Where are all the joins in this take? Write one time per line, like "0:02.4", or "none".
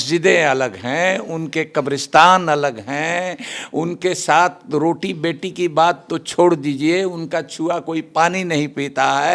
none